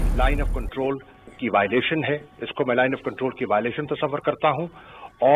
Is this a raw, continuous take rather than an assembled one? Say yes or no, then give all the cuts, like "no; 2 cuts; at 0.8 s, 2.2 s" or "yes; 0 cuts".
yes; 0 cuts